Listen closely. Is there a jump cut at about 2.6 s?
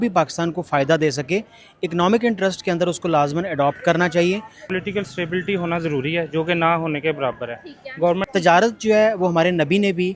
no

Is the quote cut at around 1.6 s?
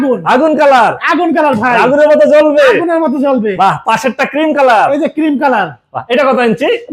no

